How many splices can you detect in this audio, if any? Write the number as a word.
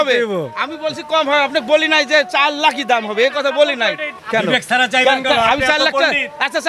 one